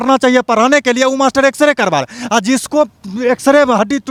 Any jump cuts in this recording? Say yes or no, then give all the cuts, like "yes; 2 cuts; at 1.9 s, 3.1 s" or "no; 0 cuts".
no; 0 cuts